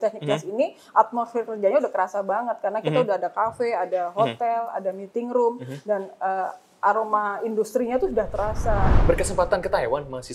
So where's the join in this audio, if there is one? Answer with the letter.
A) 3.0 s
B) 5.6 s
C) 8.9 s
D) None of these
C